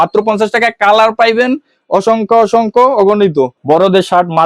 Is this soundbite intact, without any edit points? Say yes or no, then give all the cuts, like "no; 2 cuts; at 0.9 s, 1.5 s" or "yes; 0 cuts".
no; 1 cut; at 3.6 s